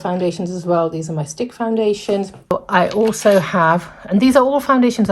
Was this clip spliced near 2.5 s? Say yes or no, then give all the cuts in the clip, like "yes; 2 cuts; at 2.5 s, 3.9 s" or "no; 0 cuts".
yes; 1 cut; at 2.5 s